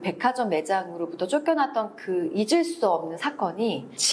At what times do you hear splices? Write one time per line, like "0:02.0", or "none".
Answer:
none